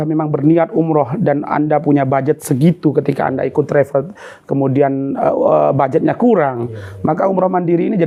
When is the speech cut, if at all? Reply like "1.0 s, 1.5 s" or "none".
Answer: none

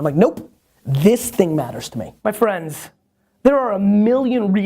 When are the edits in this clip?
2.0 s

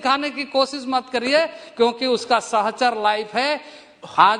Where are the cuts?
none

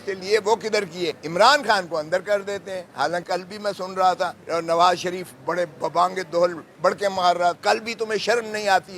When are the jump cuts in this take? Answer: 1.2 s, 3.2 s, 4.4 s, 7.6 s

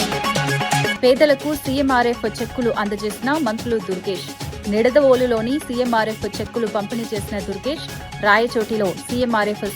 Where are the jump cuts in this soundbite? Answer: 0.9 s

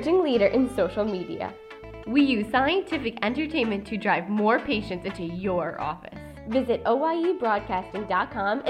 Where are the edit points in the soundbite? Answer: none

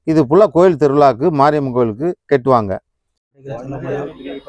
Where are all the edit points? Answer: 3.2 s

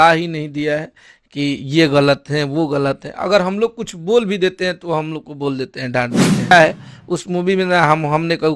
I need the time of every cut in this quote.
6.5 s

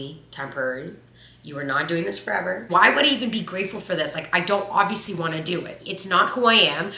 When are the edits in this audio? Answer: 2.6 s, 5.8 s

